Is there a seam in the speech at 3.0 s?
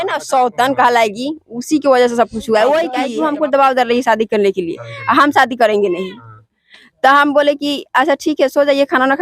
yes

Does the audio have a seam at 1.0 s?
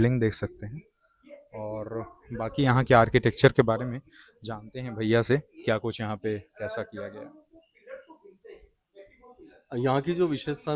no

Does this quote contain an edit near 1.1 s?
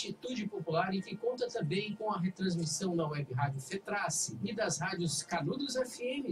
yes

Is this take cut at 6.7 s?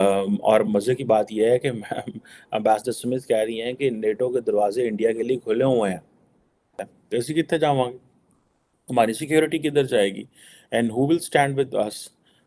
yes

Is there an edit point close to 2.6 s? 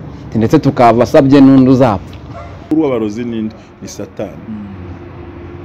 yes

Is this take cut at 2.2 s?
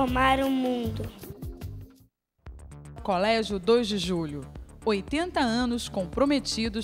yes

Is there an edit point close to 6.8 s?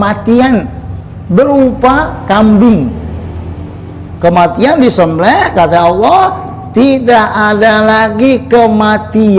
no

